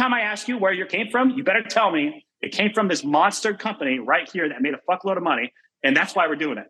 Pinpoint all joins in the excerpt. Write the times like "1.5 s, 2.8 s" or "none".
0.9 s